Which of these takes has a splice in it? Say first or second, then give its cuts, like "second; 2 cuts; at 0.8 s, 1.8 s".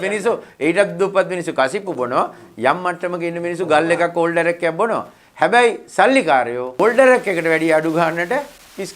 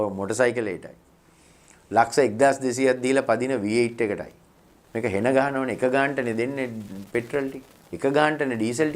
first; 1 cut; at 6.7 s